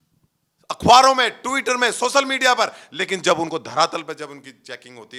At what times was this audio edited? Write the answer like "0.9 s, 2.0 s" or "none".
none